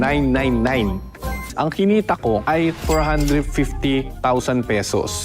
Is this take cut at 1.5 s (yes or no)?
yes